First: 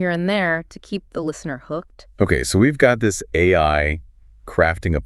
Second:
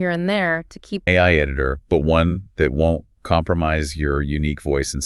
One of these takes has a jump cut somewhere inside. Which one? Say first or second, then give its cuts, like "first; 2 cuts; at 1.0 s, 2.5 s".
second; 1 cut; at 1.1 s